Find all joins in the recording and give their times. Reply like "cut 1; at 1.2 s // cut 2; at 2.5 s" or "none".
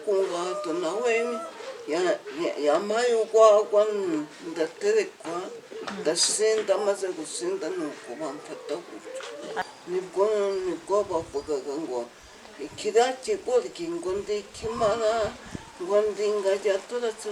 cut 1; at 9.6 s